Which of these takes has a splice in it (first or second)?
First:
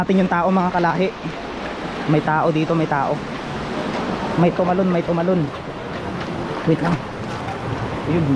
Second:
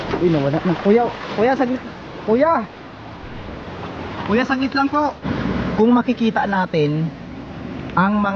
second